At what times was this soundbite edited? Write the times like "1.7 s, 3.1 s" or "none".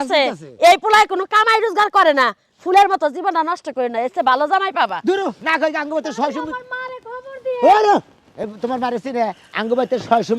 none